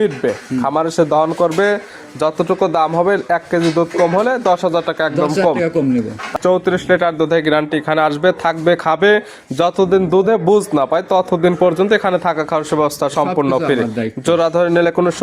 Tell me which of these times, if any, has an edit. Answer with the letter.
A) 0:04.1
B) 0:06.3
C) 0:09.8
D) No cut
B